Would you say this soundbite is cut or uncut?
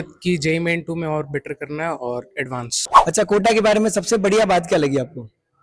cut